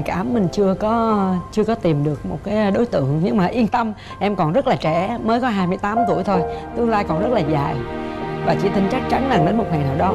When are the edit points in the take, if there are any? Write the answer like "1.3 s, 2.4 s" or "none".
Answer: none